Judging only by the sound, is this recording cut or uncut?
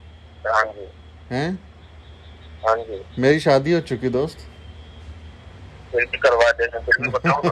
uncut